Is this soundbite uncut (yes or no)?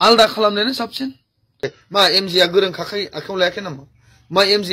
no